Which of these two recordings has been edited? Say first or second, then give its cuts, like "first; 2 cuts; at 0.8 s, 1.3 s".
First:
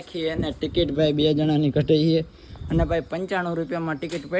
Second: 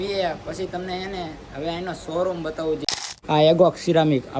second; 1 cut; at 2.8 s